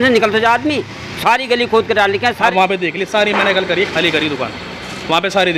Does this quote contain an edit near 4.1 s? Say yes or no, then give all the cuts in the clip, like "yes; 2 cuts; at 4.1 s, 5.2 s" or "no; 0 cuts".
no; 1 cut; at 2.4 s